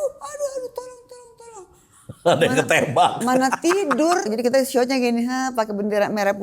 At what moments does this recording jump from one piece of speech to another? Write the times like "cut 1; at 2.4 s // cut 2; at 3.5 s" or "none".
cut 1; at 4.3 s